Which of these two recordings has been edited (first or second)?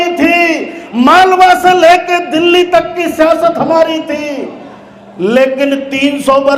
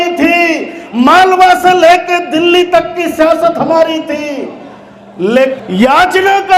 second